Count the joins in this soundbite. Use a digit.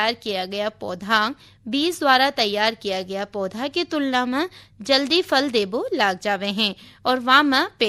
0